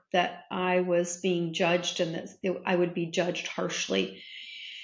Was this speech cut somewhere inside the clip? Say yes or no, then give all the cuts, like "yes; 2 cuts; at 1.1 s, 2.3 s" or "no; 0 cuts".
no; 0 cuts